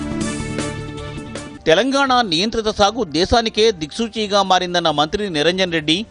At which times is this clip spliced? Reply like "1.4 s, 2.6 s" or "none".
none